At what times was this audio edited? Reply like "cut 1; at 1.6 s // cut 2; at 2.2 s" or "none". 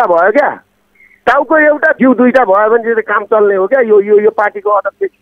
cut 1; at 1.9 s